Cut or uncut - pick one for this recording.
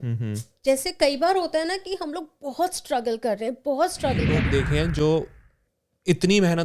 cut